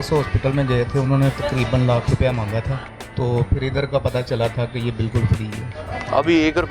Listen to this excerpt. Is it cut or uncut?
cut